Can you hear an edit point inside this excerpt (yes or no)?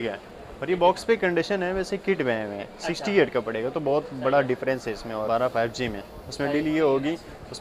yes